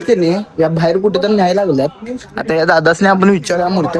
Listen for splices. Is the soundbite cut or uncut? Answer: uncut